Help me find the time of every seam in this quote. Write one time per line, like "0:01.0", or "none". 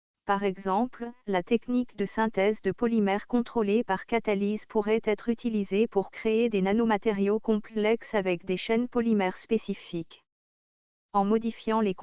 0:00.9